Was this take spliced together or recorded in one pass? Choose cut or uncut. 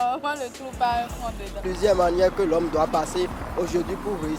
cut